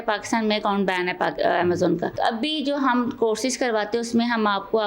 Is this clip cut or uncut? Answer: cut